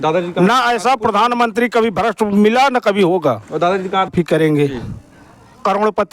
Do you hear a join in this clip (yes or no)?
yes